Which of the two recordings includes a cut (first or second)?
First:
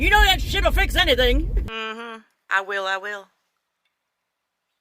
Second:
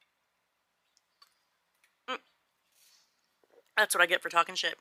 first